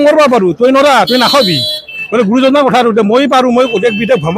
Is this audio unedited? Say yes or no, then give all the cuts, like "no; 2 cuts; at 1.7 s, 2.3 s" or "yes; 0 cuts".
yes; 0 cuts